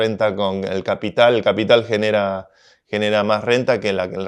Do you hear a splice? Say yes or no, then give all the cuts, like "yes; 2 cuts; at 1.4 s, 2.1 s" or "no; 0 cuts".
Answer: no; 0 cuts